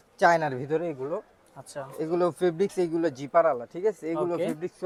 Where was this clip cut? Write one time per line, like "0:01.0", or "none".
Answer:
none